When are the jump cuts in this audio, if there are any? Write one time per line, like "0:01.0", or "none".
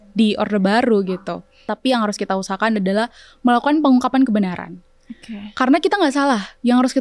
0:01.7